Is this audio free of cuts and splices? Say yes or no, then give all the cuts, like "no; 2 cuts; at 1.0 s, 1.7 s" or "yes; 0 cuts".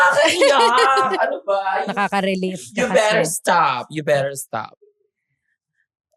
yes; 0 cuts